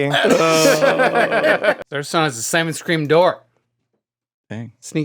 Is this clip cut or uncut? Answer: cut